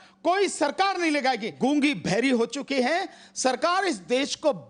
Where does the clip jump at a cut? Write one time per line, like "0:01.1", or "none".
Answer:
0:01.5